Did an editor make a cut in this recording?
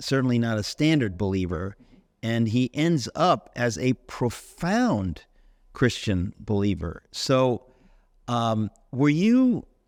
no; 0 cuts

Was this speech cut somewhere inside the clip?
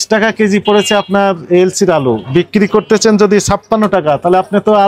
no; 0 cuts

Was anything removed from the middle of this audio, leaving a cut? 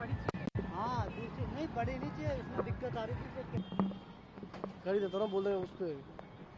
no; 0 cuts

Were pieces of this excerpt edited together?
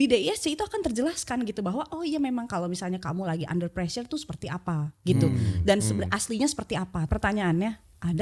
yes; 1 cut; at 7.1 s

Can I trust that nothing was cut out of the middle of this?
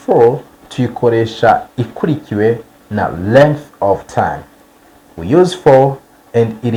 yes; 0 cuts

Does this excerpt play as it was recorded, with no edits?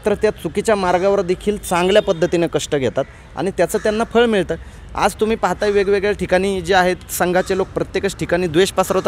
yes; 0 cuts

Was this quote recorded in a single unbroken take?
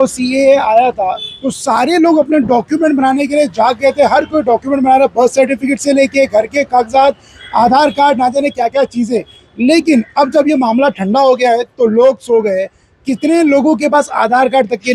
yes; 0 cuts

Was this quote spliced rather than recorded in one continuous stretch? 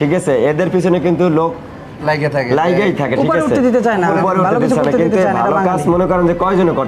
no; 0 cuts

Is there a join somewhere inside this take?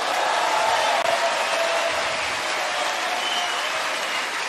no; 0 cuts

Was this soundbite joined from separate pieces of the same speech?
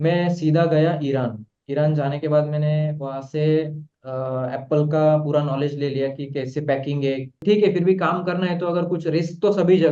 yes; 1 cut; at 7.4 s

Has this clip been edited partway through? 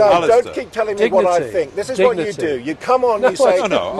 no; 0 cuts

